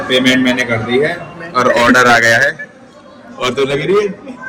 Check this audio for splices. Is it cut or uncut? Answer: uncut